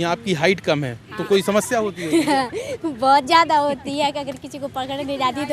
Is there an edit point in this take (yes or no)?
no